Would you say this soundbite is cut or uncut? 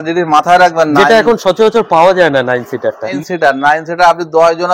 cut